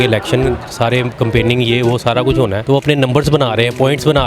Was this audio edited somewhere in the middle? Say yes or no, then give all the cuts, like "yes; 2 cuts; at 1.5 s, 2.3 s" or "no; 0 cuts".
yes; 1 cut; at 2.6 s